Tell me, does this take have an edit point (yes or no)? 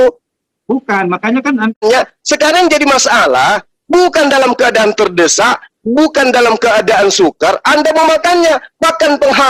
yes